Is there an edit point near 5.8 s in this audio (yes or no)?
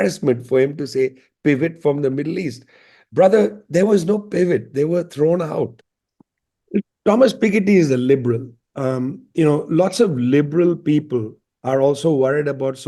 yes